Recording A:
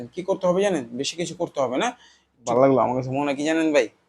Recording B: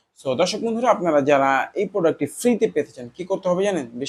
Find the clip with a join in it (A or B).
A